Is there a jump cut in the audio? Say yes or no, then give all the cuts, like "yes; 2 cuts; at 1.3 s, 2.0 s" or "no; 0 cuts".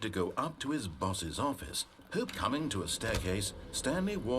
yes; 1 cut; at 2.3 s